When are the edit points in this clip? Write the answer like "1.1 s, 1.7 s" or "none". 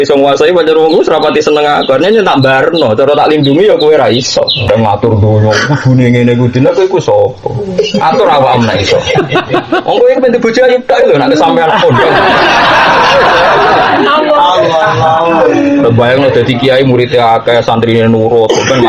4.7 s